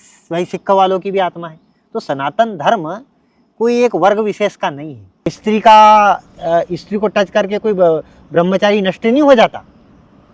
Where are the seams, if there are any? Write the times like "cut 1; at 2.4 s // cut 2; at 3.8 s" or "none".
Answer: cut 1; at 5.3 s